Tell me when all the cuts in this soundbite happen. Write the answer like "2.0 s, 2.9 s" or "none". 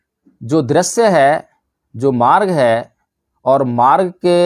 none